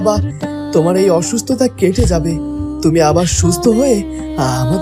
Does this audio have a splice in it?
no; 0 cuts

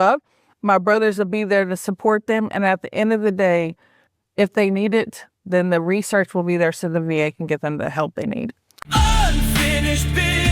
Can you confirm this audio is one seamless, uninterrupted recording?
no; 1 cut; at 8.7 s

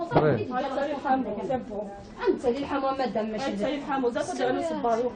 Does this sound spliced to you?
yes; 1 cut; at 3.1 s

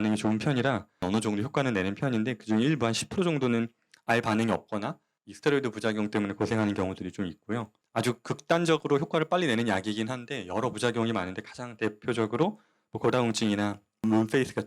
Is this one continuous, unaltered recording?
no; 2 cuts; at 1.0 s, 7.8 s

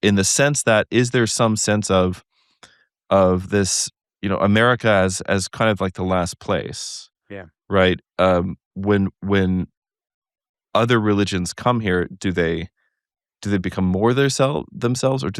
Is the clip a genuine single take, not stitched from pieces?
yes; 0 cuts

